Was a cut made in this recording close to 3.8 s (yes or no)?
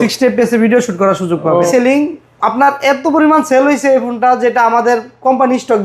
no